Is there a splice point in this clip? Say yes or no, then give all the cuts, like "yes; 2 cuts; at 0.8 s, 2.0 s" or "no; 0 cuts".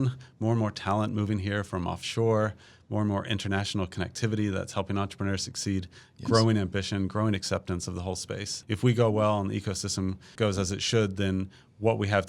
yes; 2 cuts; at 8.5 s, 10.3 s